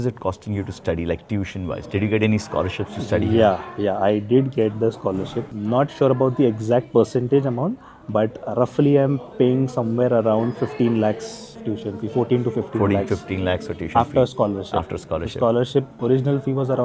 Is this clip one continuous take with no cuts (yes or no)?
yes